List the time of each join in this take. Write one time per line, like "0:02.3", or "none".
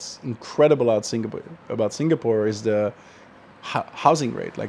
none